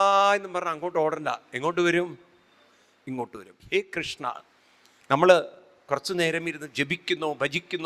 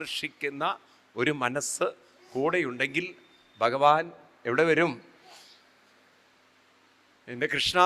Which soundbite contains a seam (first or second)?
first